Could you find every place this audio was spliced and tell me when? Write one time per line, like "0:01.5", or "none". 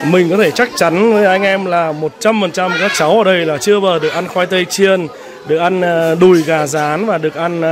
none